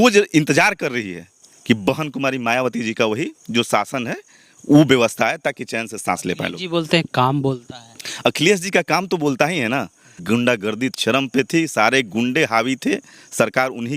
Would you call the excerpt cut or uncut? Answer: cut